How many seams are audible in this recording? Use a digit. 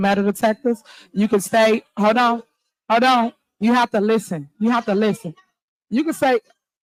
0